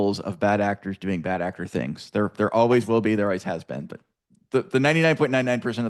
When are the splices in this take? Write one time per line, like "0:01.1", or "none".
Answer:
none